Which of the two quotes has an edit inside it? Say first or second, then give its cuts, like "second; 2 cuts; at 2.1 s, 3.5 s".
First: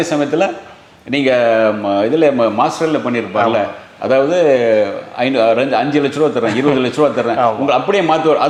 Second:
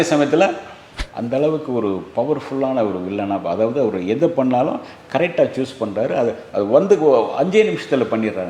second; 1 cut; at 0.9 s